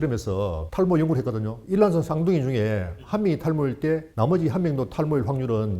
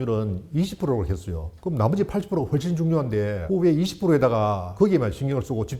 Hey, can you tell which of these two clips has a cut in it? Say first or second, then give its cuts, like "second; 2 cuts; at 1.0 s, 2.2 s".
first; 1 cut; at 4.1 s